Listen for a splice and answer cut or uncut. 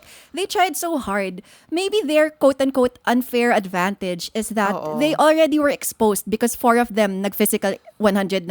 uncut